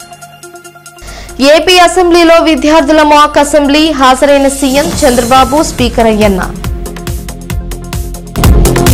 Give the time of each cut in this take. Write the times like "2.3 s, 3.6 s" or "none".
1.0 s